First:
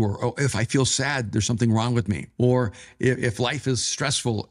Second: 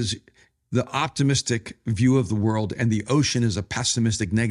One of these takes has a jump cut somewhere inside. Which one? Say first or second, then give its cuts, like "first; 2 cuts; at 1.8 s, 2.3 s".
first; 1 cut; at 2.3 s